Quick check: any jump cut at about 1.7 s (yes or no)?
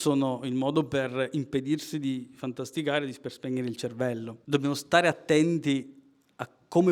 no